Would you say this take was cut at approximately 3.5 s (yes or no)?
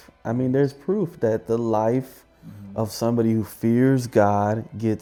no